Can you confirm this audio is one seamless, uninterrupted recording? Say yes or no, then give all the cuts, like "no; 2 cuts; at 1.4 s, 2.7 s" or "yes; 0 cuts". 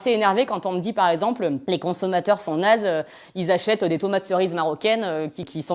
no; 1 cut; at 1.6 s